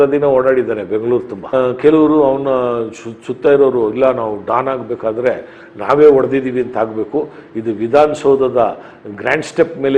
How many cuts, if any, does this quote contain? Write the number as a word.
one